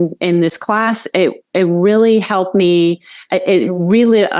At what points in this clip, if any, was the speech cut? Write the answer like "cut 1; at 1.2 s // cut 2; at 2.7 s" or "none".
none